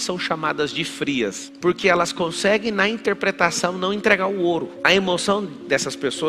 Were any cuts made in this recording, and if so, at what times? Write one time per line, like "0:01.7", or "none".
0:01.5